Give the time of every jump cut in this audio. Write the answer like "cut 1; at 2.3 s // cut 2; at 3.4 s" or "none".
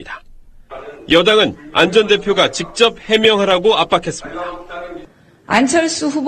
none